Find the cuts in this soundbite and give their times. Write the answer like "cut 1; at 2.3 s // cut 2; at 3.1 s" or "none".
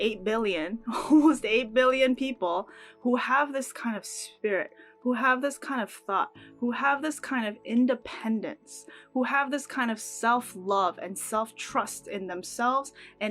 none